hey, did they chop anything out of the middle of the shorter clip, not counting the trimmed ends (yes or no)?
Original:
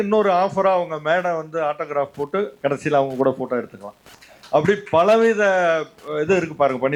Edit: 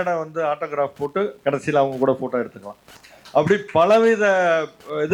no